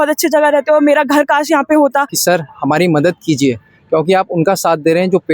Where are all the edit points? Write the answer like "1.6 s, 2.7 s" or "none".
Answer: 2.1 s